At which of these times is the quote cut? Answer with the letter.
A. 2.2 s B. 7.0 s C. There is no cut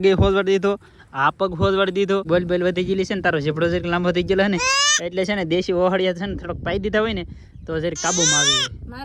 A